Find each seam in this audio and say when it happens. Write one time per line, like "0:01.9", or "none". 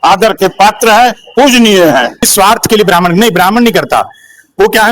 0:02.3